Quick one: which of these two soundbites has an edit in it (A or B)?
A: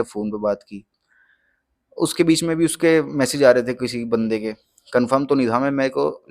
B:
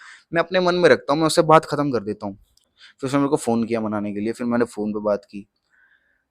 B